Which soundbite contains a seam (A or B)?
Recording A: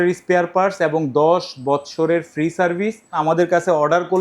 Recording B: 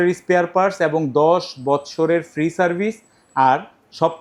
A